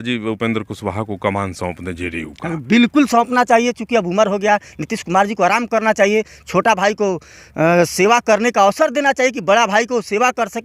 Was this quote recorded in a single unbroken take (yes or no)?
yes